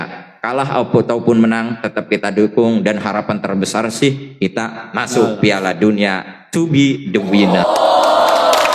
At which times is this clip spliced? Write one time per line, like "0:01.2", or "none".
0:07.6